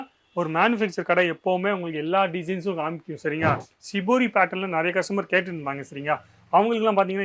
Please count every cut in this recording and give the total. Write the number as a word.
one